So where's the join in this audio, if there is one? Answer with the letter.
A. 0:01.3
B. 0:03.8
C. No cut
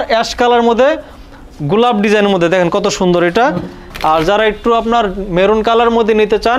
B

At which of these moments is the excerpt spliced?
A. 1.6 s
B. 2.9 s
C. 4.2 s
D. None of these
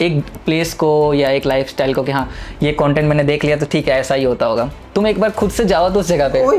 D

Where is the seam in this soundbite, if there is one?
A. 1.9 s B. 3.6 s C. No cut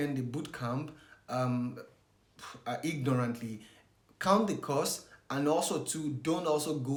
C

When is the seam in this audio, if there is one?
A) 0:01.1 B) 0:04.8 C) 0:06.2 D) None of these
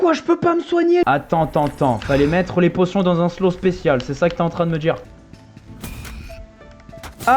A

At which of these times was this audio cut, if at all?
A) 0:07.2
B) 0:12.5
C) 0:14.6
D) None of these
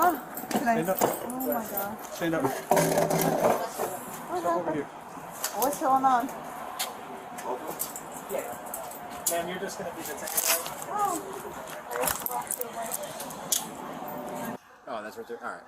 C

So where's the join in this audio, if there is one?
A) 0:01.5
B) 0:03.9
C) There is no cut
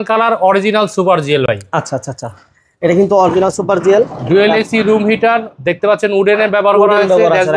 C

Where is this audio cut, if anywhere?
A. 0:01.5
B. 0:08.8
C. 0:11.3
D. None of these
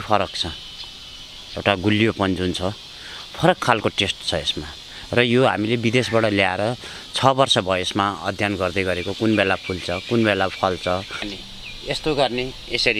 C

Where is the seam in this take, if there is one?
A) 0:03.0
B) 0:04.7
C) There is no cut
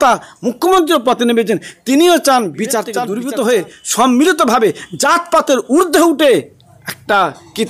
A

